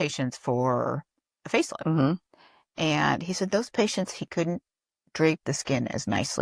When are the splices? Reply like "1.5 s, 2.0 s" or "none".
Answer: none